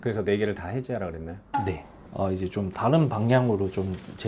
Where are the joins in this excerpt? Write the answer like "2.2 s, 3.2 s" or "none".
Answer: 2.0 s